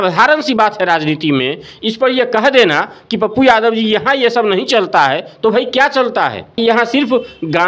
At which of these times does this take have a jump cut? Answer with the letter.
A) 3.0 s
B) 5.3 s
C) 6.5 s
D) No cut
C